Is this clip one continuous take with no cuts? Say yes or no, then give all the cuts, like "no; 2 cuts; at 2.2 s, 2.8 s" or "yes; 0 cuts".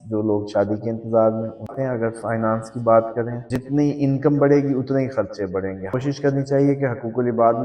no; 2 cuts; at 1.7 s, 6.0 s